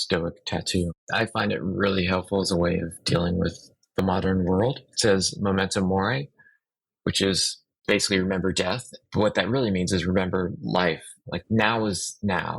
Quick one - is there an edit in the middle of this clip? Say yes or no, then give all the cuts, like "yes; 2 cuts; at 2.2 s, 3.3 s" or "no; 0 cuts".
yes; 2 cuts; at 1.0 s, 4.8 s